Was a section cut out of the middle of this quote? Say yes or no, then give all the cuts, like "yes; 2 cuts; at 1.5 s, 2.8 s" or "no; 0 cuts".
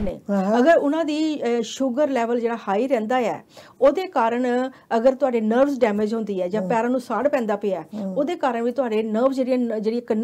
no; 0 cuts